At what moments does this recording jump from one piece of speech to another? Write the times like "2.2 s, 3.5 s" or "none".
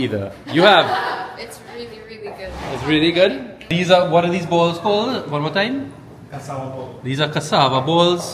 3.7 s